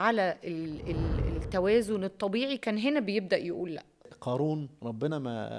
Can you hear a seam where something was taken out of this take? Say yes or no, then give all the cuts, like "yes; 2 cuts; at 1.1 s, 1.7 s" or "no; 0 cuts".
yes; 2 cuts; at 4.1 s, 4.7 s